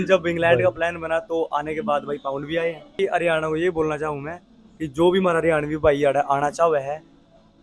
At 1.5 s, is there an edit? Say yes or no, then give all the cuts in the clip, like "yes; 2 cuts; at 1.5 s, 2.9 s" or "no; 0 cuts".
no; 1 cut; at 3.0 s